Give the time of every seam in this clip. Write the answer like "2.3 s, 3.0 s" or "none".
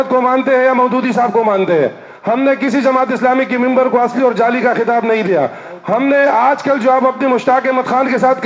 none